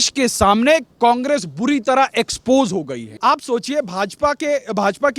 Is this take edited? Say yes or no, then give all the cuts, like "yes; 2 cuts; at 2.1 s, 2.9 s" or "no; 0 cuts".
yes; 1 cut; at 3.0 s